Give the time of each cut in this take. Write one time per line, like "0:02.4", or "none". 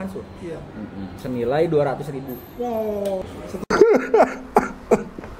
0:03.2